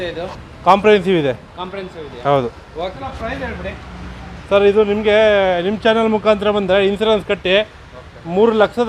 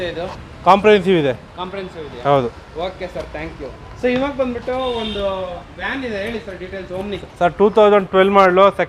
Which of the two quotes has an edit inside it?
first; 1 cut; at 3.0 s

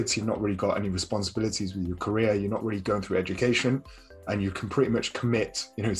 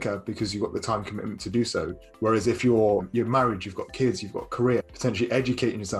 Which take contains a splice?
second; 2 cuts; at 3.1 s, 4.9 s

